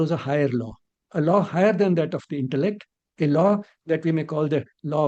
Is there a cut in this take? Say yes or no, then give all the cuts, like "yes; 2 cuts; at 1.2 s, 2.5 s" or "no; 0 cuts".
no; 0 cuts